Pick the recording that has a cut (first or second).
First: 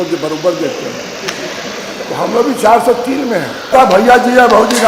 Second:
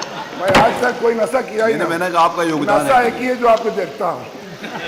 first